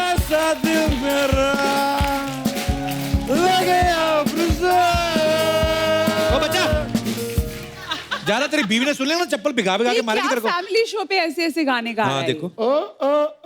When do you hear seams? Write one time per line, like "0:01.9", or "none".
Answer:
none